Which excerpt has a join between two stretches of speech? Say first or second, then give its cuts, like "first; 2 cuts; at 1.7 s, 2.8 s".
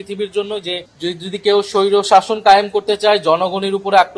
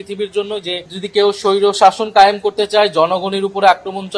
second; 1 cut; at 0.9 s